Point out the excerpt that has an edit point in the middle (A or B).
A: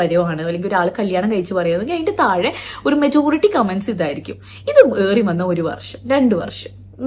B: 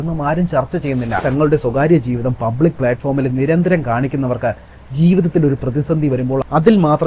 B